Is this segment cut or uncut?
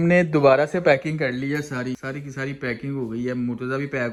uncut